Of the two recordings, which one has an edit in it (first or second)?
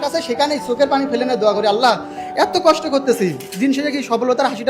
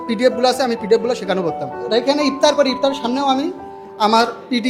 second